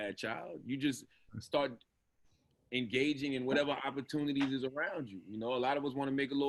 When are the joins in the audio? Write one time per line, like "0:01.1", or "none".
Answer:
none